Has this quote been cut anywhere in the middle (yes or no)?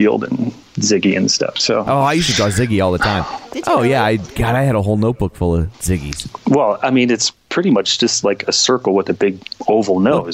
yes